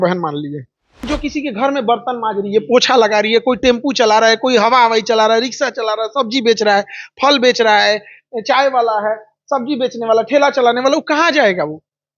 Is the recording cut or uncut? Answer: cut